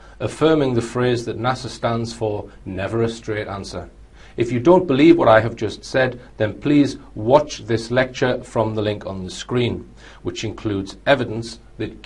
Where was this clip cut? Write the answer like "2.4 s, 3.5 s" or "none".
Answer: 5.6 s